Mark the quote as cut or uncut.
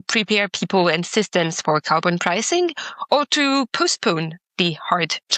uncut